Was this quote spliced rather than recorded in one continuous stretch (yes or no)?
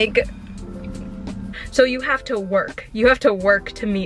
yes